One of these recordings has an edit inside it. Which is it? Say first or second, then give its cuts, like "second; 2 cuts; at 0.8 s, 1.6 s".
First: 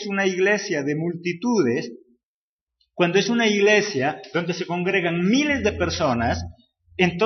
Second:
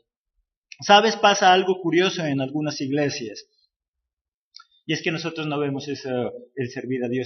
second; 1 cut; at 1.9 s